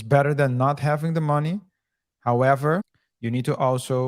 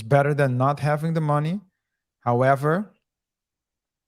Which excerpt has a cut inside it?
first; 1 cut; at 3.0 s

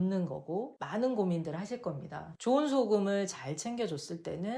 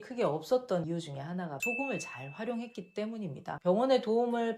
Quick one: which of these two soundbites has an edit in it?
second; 1 cut; at 3.5 s

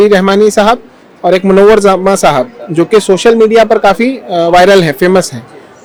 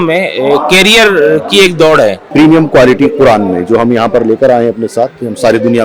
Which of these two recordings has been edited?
second; 1 cut; at 2.2 s

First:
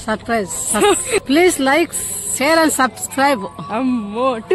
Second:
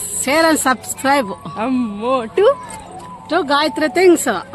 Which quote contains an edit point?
first; 1 cut; at 1.2 s

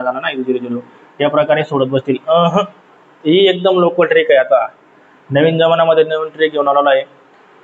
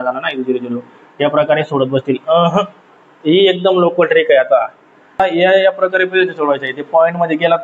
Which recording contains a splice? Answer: second; 1 cut; at 5.2 s

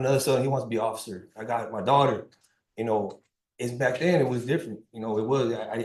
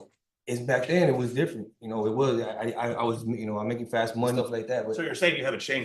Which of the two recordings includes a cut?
second; 1 cut; at 4.4 s

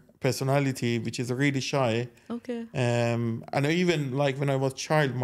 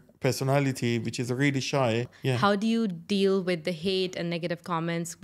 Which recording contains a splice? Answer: second; 1 cut; at 2.1 s

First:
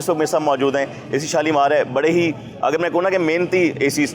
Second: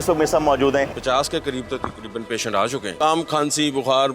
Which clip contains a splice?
second; 2 cuts; at 1.0 s, 2.9 s

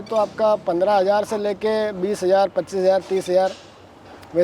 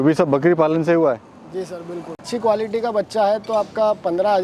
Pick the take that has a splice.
second; 1 cut; at 2.2 s

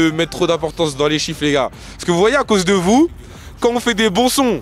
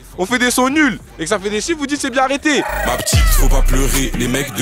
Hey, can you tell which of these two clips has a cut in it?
second; 1 cut; at 2.7 s

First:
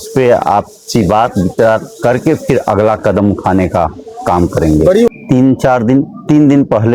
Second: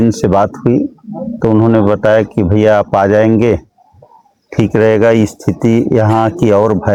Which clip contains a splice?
first; 1 cut; at 5.1 s

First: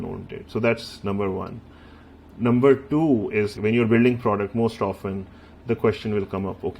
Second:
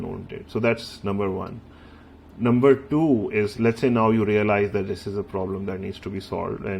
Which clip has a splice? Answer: first; 1 cut; at 3.5 s

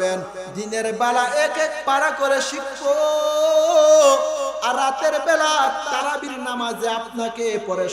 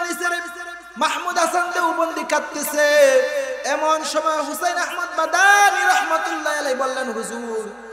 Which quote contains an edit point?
first; 1 cut; at 5.9 s

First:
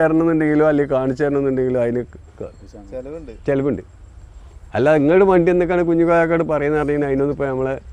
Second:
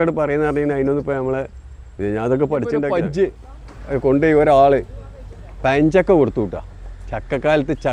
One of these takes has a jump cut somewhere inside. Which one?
second; 1 cut; at 3.0 s

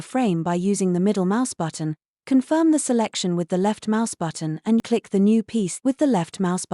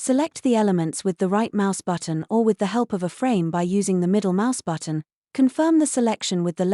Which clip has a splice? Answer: first; 2 cuts; at 4.8 s, 5.7 s

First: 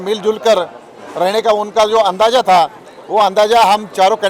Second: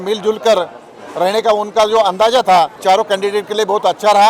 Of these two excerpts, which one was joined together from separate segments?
second; 1 cut; at 2.8 s

